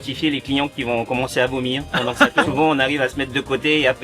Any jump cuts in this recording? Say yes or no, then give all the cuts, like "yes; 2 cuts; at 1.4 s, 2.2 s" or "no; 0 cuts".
yes; 1 cut; at 2.5 s